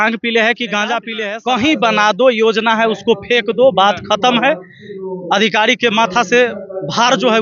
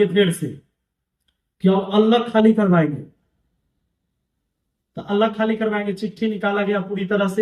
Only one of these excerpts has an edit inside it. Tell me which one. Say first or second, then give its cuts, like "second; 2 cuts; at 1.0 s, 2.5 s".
first; 1 cut; at 1.1 s